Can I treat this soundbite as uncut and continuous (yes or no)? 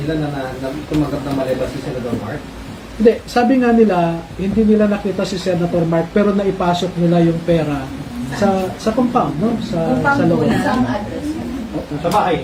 yes